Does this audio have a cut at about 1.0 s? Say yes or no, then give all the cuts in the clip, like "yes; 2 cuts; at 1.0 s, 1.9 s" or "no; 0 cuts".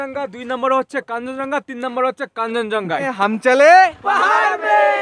no; 1 cut; at 3.1 s